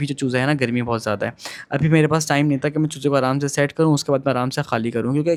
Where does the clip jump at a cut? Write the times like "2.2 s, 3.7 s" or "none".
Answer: none